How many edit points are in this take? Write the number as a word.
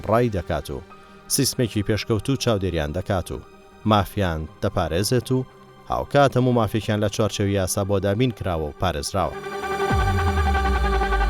one